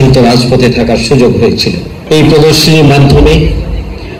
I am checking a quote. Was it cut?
yes; 1 cut; at 1.9 s

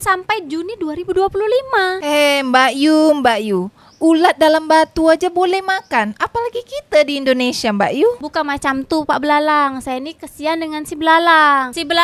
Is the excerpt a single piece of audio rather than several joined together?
no; 2 cuts; at 2.0 s, 8.2 s

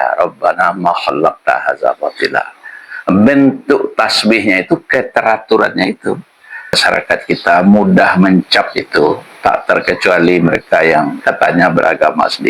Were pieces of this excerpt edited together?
yes; 1 cut; at 6.8 s

